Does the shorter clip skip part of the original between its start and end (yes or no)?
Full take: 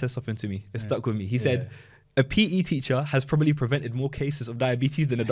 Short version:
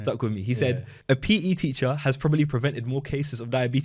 yes